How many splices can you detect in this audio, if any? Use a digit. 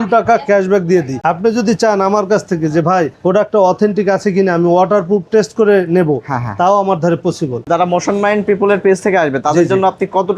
2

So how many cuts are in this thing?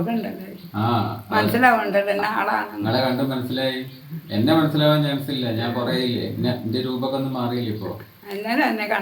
0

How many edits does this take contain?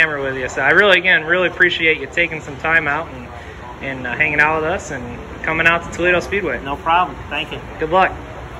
0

